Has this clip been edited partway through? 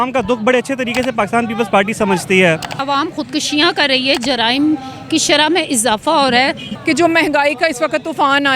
yes; 2 cuts; at 2.7 s, 6.7 s

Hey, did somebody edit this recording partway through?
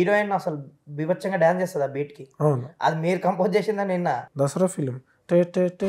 yes; 1 cut; at 4.2 s

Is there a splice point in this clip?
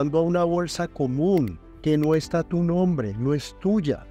no; 0 cuts

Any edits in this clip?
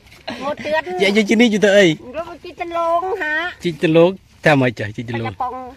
no; 0 cuts

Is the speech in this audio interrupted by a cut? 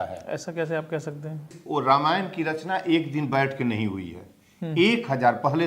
yes; 1 cut; at 1.6 s

